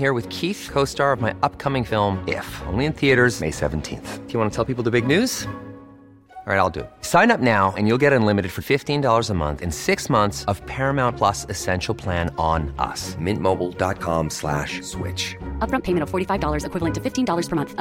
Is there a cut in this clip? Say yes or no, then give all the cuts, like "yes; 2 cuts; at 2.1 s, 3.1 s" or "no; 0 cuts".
no; 0 cuts